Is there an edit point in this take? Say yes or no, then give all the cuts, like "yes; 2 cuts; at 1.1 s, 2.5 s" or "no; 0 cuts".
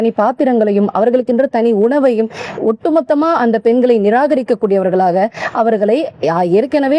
no; 0 cuts